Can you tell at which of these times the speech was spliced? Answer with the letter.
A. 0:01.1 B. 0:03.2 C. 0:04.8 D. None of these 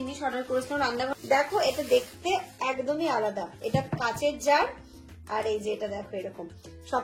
A